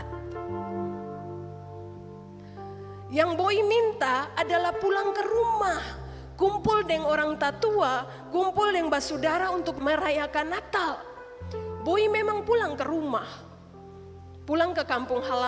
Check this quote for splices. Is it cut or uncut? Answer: cut